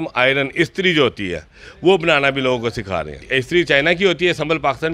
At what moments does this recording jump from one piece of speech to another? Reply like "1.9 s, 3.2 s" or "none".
3.2 s